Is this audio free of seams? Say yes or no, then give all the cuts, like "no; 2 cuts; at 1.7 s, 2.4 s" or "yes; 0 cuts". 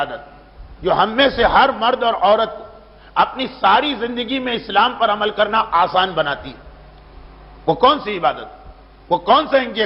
no; 1 cut; at 6.1 s